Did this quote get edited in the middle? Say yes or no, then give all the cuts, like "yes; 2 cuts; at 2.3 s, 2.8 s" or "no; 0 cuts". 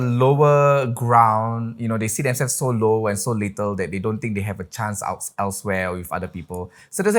no; 0 cuts